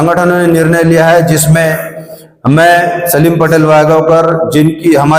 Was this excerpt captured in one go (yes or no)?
yes